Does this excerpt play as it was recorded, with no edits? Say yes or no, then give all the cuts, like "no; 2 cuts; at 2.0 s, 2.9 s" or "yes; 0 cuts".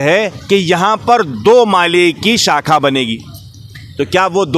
yes; 0 cuts